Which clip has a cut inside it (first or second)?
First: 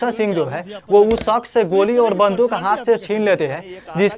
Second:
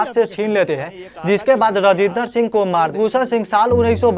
second